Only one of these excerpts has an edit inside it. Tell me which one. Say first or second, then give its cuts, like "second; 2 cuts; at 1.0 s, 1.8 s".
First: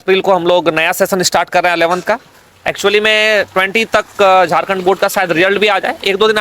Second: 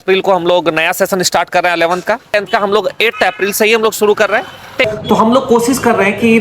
second; 2 cuts; at 2.3 s, 4.9 s